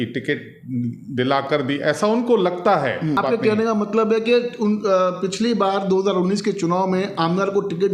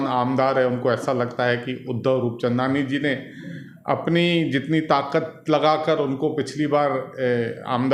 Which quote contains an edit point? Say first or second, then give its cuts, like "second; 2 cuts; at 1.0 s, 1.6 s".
first; 1 cut; at 3.2 s